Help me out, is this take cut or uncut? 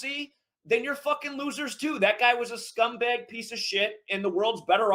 uncut